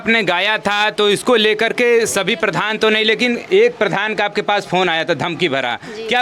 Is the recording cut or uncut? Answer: uncut